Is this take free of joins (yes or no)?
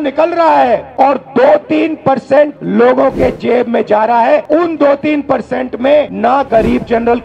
no